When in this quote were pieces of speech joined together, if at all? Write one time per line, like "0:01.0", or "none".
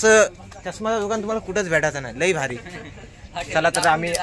none